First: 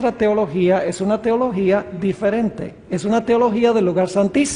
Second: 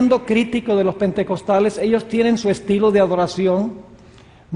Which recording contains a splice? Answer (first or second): second